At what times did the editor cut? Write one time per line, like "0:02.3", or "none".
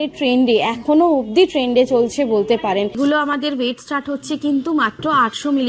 0:02.9